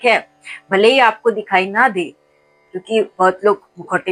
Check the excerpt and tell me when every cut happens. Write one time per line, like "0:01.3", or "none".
none